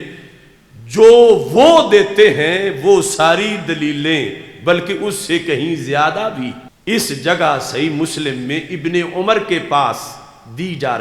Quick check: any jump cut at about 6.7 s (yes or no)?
yes